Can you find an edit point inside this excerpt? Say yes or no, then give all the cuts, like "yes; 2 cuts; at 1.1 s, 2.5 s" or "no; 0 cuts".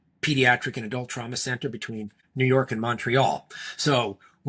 no; 0 cuts